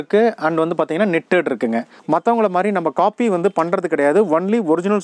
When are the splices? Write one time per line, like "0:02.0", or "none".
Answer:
0:01.9